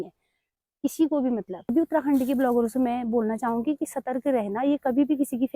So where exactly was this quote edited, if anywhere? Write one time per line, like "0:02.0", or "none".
0:01.7